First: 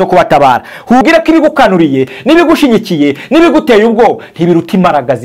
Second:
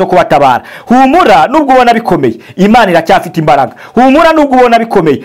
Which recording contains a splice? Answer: first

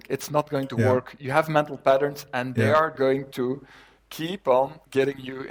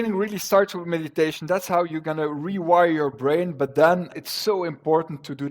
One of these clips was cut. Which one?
second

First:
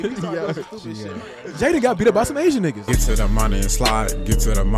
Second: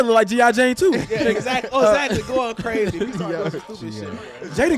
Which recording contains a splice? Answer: first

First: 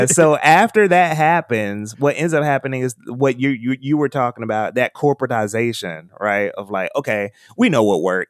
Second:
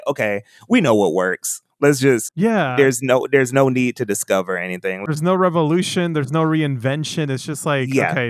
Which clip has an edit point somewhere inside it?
second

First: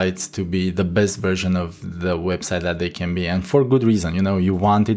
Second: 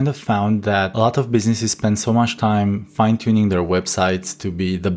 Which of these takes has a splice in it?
second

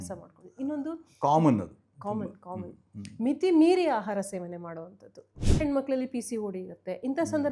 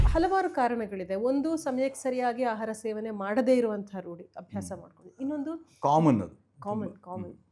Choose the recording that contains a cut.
first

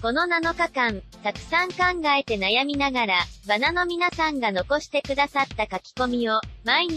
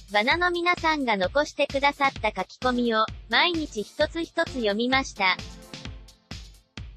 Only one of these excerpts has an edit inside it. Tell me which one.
second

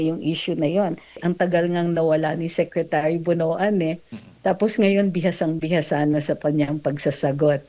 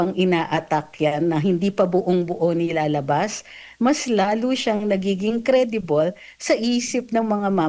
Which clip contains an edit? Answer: first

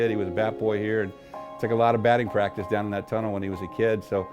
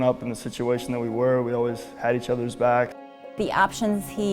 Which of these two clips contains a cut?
second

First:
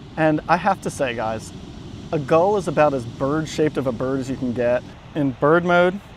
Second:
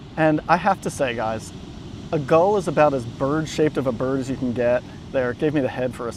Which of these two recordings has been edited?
first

